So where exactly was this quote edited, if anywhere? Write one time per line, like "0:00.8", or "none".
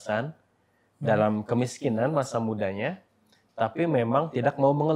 none